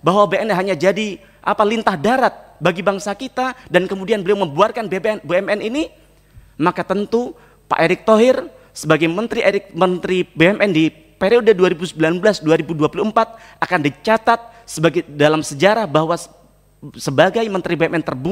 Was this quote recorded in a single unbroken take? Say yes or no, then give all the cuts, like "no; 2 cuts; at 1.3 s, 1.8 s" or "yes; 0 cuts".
yes; 0 cuts